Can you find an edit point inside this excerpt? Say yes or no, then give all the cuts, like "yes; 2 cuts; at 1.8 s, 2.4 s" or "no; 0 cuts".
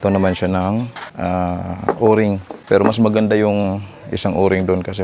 yes; 2 cuts; at 1.0 s, 2.5 s